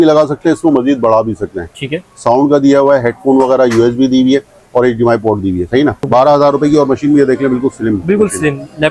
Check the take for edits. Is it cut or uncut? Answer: cut